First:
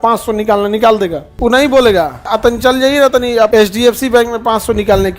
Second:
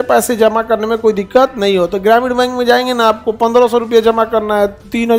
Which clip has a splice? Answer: first; 3 cuts; at 1.2 s, 2.2 s, 3.5 s

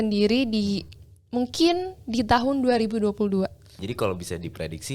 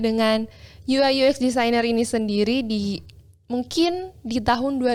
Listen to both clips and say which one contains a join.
first; 1 cut; at 3.8 s

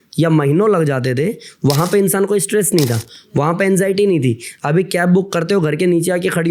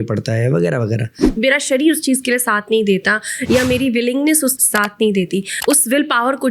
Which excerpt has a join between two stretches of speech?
second; 3 cuts; at 1.2 s, 4.6 s, 5.5 s

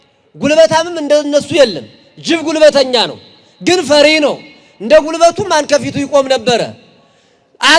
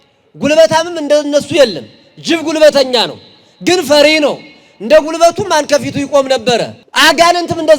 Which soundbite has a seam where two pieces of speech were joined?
second; 1 cut; at 6.8 s

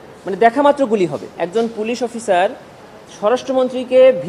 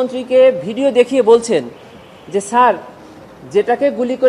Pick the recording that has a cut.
first; 1 cut; at 1.4 s

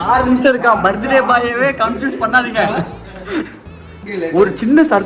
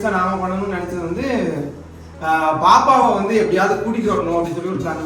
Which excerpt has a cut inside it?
first; 1 cut; at 4.1 s

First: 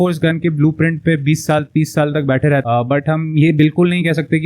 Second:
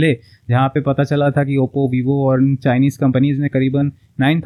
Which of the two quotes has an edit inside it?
first; 1 cut; at 2.6 s

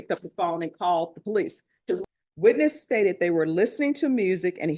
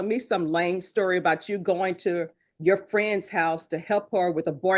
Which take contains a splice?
first; 1 cut; at 2.0 s

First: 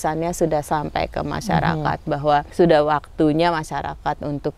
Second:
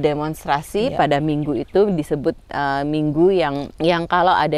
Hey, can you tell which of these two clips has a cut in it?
first; 1 cut; at 2.5 s

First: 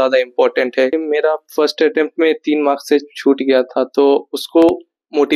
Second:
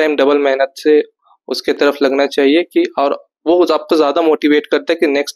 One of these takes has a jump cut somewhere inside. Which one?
first; 1 cut; at 1.0 s

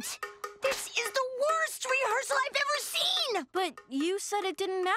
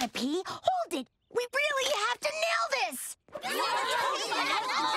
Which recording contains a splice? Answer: second; 1 cut; at 3.2 s

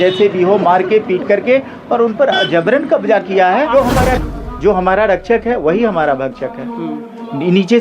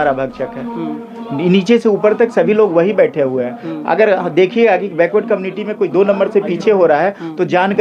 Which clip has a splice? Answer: first; 1 cut; at 4.1 s

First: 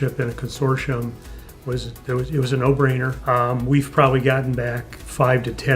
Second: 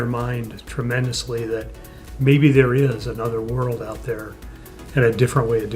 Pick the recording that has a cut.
first; 1 cut; at 3.1 s

